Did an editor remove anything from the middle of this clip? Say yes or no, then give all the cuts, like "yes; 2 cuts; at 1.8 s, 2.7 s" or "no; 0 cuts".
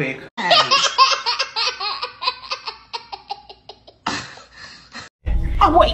no; 0 cuts